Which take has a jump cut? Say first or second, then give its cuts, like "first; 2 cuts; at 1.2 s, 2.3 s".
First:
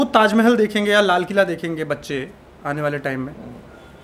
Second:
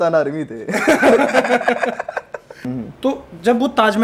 second; 1 cut; at 2.7 s